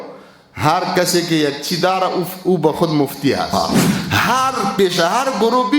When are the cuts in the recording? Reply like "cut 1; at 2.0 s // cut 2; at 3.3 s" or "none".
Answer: cut 1; at 3.5 s